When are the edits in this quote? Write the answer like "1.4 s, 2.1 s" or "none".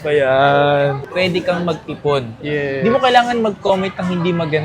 1.0 s